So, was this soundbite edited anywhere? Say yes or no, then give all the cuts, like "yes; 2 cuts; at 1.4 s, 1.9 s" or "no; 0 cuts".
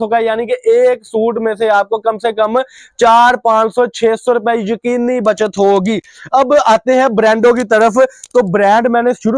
no; 0 cuts